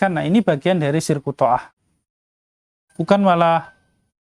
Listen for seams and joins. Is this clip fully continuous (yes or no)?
no